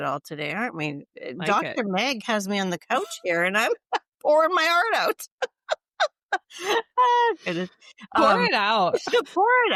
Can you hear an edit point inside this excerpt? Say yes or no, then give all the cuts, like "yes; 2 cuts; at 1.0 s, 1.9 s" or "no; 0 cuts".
no; 0 cuts